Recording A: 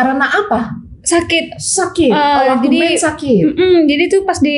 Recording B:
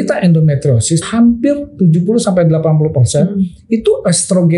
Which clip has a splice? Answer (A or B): B